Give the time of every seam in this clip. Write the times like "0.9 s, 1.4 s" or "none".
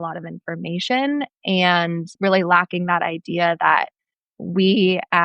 2.1 s